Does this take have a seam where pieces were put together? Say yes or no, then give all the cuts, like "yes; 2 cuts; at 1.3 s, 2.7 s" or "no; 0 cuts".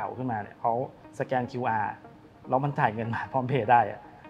yes; 1 cut; at 1.0 s